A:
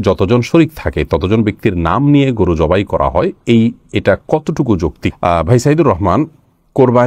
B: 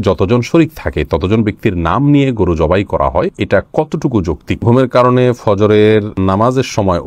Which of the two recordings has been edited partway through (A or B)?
B